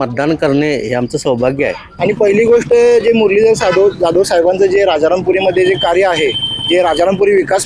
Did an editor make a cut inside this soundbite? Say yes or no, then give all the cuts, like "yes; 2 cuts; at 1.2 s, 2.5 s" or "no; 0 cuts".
yes; 1 cut; at 1.8 s